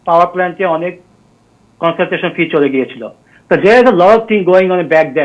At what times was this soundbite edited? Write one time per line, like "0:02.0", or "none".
none